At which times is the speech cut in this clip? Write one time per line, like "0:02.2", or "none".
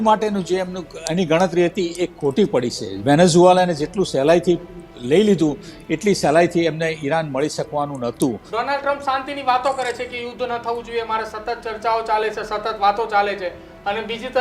0:08.4